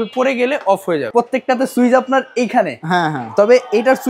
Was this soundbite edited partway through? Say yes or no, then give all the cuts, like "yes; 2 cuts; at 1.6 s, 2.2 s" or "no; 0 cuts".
yes; 1 cut; at 1.1 s